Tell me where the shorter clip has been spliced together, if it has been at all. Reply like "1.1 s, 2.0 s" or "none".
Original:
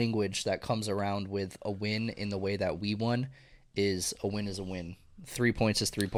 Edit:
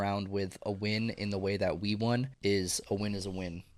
2.3 s

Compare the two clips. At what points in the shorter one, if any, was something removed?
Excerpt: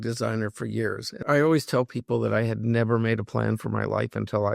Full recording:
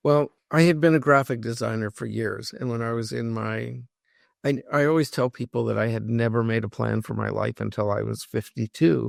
1.2 s

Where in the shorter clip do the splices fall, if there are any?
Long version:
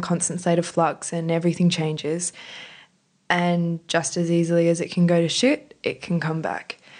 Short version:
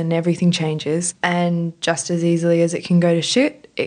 1.1 s

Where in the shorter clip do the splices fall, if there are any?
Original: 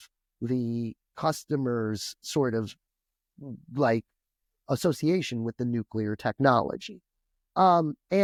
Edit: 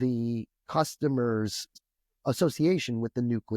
1.7 s

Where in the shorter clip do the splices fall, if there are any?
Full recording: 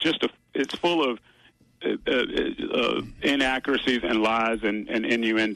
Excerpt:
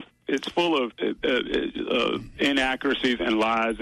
0.9 s

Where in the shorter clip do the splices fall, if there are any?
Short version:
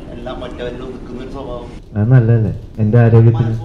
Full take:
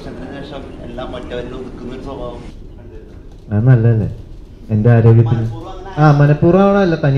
1.8 s, 2.6 s

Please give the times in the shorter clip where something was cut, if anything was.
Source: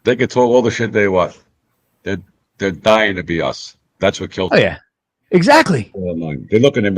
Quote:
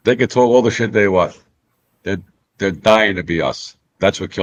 none

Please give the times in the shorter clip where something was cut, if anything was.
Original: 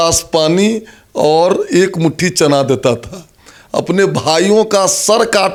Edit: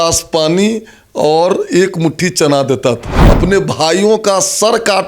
3.1 s

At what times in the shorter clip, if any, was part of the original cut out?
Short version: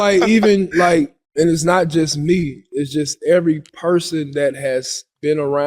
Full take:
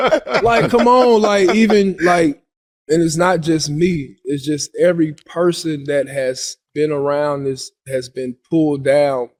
1.2 s

